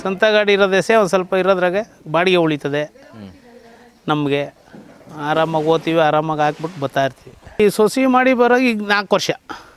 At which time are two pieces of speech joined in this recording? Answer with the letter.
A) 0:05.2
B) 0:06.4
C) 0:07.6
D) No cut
C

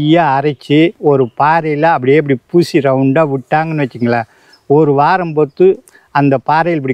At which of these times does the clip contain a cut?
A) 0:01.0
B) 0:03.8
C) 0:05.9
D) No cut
A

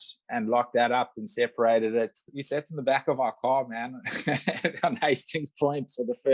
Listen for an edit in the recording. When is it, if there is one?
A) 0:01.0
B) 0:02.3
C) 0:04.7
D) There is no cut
B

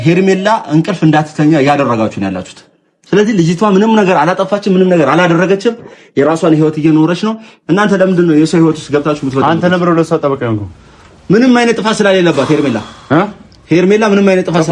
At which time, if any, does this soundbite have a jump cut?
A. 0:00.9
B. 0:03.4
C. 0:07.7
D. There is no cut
A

